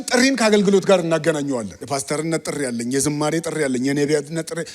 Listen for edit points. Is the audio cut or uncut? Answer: cut